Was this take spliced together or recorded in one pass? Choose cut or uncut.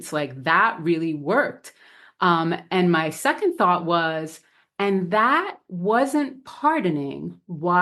uncut